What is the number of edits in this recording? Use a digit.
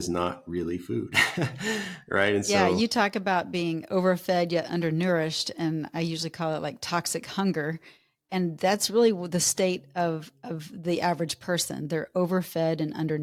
0